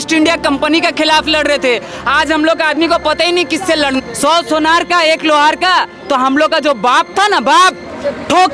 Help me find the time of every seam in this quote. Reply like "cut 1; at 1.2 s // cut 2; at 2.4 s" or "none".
cut 1; at 4.0 s